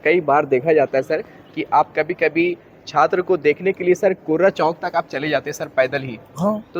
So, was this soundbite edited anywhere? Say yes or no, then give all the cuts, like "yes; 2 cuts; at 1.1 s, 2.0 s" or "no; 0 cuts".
no; 0 cuts